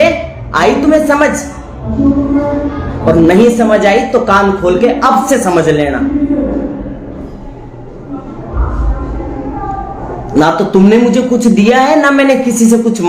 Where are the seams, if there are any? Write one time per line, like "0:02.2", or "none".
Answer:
none